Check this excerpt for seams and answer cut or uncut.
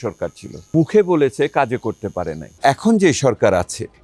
cut